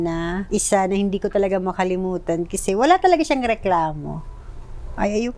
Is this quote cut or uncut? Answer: uncut